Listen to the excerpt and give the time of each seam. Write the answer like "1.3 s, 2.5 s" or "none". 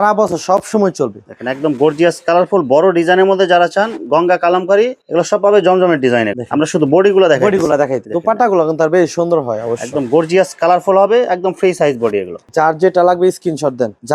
none